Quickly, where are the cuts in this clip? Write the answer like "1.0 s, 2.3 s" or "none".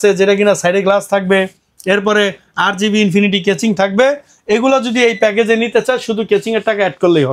none